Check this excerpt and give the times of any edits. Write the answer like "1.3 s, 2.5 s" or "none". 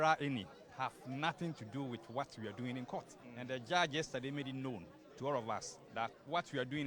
3.2 s, 5.9 s